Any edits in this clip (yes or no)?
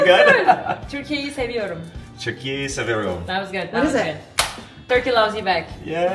yes